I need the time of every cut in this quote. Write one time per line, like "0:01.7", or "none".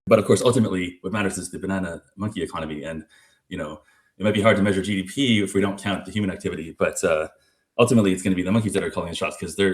none